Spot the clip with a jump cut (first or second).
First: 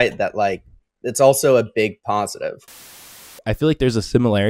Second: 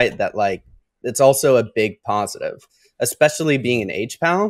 first